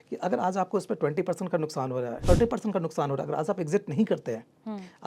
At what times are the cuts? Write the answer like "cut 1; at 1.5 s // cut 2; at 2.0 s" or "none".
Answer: cut 1; at 2.2 s